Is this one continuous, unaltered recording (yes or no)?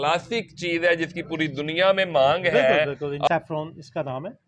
no